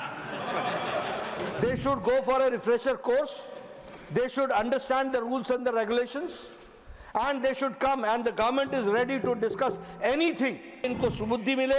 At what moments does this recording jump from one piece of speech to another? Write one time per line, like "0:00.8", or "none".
0:01.5
0:10.9